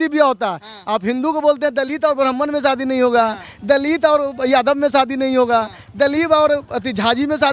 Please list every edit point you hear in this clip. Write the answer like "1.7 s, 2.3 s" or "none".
none

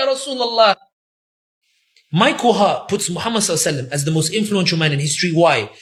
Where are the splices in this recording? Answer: none

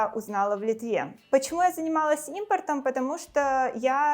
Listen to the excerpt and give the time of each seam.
1.2 s

